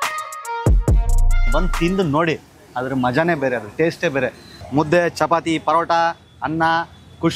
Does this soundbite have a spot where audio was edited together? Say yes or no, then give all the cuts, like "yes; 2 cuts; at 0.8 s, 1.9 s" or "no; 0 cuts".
yes; 2 cuts; at 1.5 s, 4.5 s